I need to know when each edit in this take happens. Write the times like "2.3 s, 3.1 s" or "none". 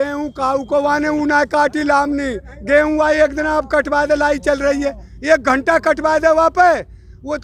none